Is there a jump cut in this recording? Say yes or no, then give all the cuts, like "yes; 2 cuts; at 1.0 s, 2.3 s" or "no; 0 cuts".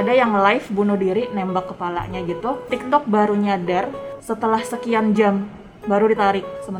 no; 0 cuts